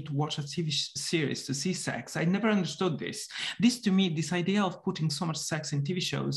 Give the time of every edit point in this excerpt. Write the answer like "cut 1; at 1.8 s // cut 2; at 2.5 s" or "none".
none

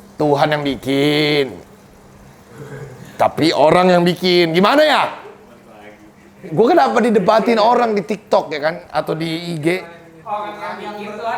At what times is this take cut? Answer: cut 1; at 10.1 s

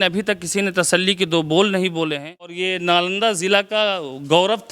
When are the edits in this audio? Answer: cut 1; at 2.6 s

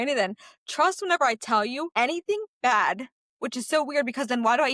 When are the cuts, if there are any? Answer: none

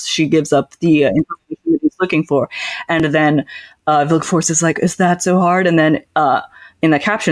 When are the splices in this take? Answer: none

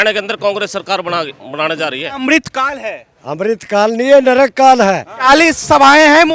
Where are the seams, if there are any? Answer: cut 1; at 2.1 s // cut 2; at 5.1 s

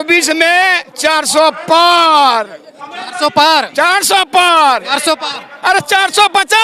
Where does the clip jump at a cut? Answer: none

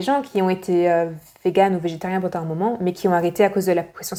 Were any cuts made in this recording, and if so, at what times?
none

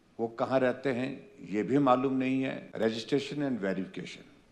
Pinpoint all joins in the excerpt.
cut 1; at 3.0 s

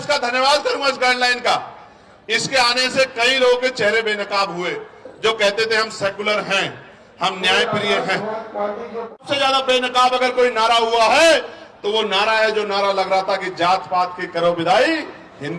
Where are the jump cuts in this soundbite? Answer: cut 1; at 9.2 s

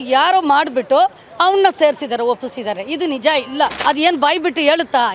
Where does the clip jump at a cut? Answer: cut 1; at 3.8 s

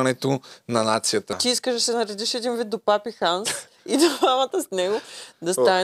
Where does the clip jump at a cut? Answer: cut 1; at 1.4 s

